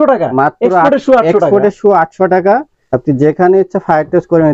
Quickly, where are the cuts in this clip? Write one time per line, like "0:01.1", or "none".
0:02.8